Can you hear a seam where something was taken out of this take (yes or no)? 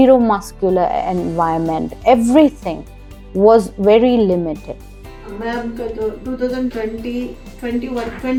no